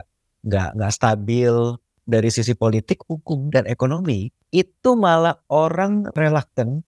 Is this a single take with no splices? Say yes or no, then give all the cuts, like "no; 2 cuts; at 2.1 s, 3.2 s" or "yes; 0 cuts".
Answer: no; 3 cuts; at 1.9 s, 4.3 s, 6.1 s